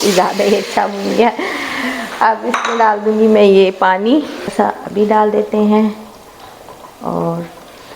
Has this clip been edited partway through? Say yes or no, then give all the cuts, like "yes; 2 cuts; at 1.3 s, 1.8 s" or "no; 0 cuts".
yes; 1 cut; at 4.5 s